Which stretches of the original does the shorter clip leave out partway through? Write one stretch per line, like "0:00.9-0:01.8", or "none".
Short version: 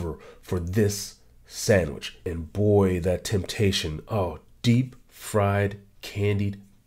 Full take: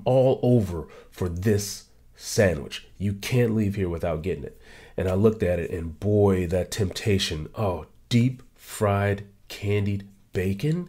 0:02.9-0:05.7

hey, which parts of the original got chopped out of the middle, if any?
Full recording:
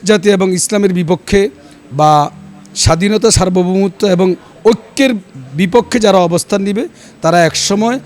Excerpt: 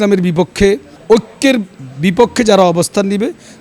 0:01.6-0:04.5

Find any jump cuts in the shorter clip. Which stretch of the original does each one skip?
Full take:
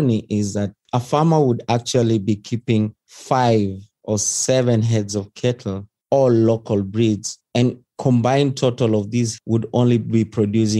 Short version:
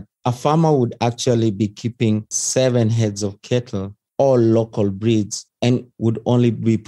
0:03.1-0:04.3
0:07.8-0:09.4

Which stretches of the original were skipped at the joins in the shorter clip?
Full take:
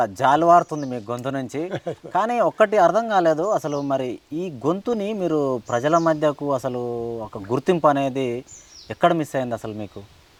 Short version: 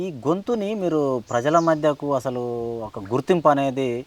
none

